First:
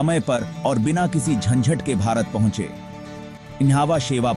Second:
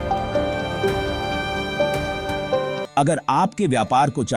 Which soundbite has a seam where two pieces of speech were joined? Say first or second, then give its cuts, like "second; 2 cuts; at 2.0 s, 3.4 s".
second; 1 cut; at 2.8 s